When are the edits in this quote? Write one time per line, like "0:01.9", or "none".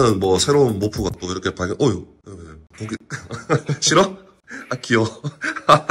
none